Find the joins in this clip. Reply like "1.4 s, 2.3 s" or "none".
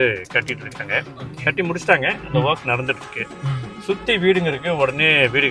none